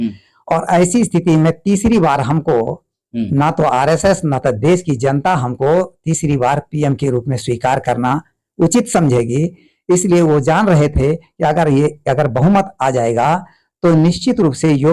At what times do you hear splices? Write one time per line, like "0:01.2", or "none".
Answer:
none